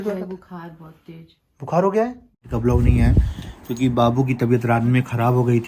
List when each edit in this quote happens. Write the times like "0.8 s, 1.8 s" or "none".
2.5 s